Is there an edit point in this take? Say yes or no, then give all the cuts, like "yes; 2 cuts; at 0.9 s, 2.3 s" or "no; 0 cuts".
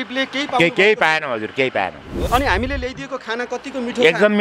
yes; 1 cut; at 2.2 s